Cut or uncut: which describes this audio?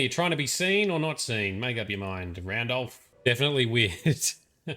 cut